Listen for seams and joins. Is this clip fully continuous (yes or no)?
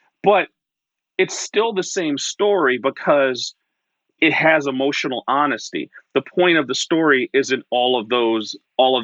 no